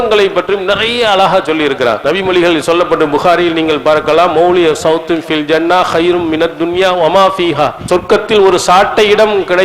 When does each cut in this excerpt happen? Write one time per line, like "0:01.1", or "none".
0:07.8